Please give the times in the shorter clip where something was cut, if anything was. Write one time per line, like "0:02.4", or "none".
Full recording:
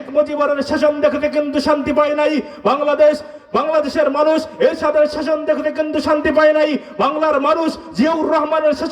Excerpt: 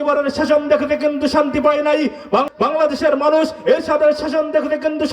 0:02.5